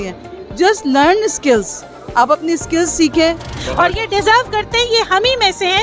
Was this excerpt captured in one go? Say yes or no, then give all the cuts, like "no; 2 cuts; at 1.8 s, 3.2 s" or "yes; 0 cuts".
no; 1 cut; at 3.6 s